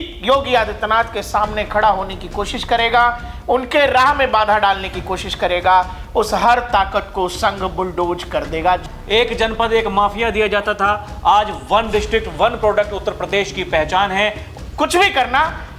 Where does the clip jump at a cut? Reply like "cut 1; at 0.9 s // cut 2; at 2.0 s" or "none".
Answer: cut 1; at 8.9 s // cut 2; at 14.4 s